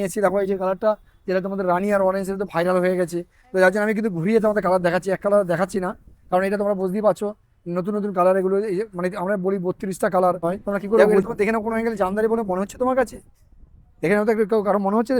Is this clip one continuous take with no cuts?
no; 1 cut; at 11.0 s

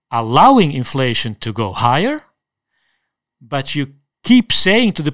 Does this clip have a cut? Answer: yes; 1 cut; at 4.1 s

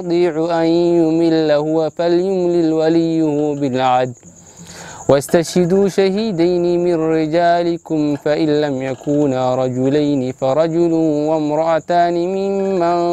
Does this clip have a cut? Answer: no; 0 cuts

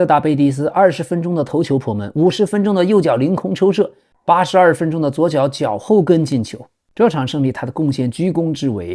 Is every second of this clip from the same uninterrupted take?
yes; 0 cuts

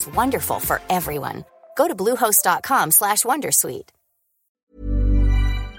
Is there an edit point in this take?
yes; 1 cut; at 4.6 s

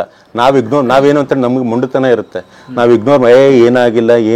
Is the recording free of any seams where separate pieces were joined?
yes; 0 cuts

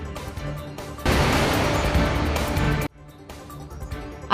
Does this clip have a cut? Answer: yes; 2 cuts; at 1.0 s, 3.4 s

